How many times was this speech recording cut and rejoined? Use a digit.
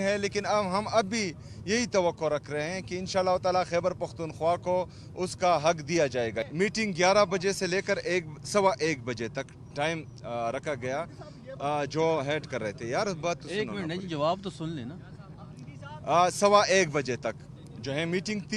1